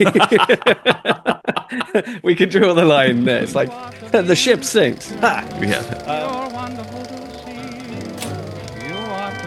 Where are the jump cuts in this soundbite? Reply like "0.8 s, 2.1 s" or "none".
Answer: 5.9 s